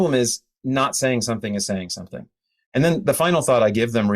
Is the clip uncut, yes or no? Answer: no